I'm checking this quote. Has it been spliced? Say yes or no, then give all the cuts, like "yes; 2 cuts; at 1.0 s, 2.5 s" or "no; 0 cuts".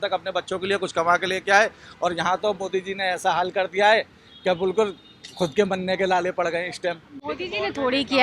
no; 0 cuts